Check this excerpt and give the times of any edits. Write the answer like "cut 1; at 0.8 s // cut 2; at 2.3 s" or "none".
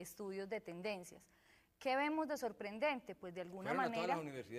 cut 1; at 3.3 s